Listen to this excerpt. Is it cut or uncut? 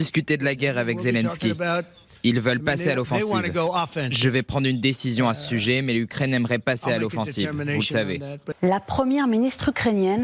cut